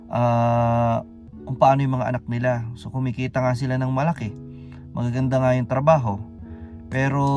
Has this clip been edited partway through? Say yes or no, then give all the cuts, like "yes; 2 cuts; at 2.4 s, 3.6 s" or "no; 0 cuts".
no; 0 cuts